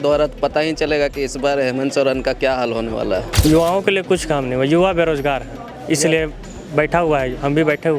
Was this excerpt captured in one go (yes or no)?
no